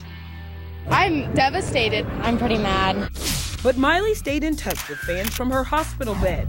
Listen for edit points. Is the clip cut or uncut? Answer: uncut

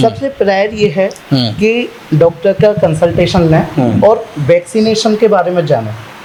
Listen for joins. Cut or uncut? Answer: uncut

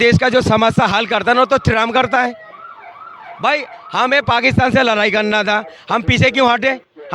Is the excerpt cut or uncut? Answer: uncut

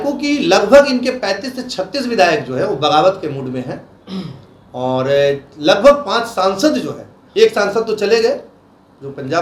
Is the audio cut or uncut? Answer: uncut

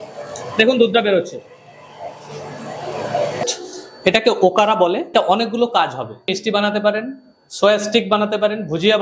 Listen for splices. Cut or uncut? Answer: cut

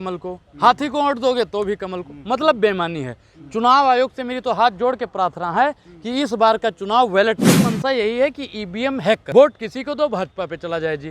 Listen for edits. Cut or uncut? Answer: cut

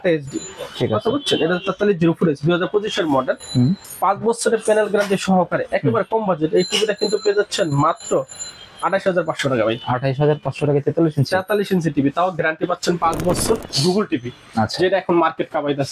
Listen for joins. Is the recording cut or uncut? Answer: cut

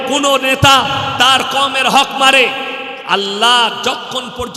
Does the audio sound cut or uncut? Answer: uncut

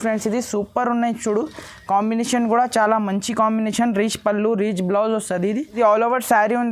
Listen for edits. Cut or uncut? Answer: cut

